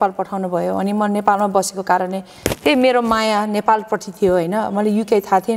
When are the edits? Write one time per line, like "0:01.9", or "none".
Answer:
none